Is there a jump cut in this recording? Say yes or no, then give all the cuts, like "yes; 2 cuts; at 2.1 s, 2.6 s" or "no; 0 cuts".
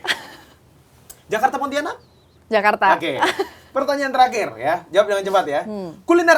no; 0 cuts